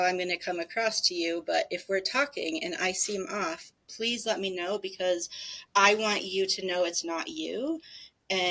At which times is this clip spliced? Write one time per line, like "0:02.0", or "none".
none